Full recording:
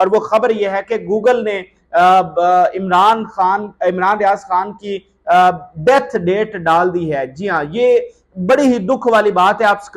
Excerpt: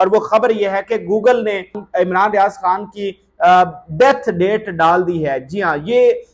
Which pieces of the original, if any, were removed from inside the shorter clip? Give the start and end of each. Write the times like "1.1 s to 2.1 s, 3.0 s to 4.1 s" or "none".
1.8 s to 3.7 s